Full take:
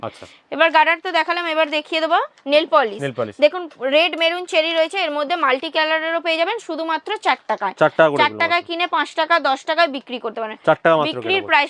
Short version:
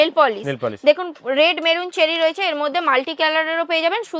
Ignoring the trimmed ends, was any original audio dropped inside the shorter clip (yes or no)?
no